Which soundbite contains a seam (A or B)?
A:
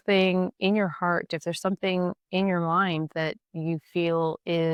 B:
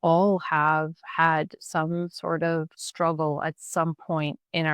B